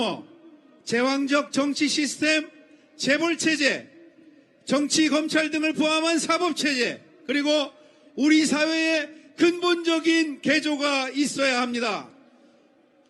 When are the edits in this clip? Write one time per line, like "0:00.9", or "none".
none